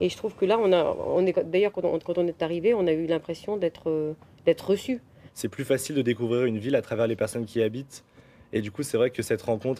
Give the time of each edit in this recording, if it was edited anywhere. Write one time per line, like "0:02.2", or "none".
0:08.7